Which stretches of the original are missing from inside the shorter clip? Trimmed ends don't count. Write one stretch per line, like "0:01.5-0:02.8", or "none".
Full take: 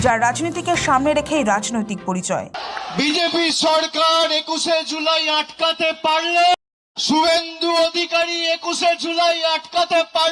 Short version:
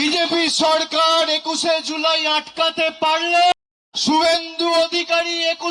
none